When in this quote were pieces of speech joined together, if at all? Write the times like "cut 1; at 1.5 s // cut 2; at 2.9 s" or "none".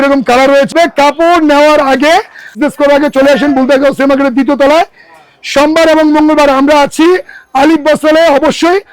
cut 1; at 0.7 s // cut 2; at 2.5 s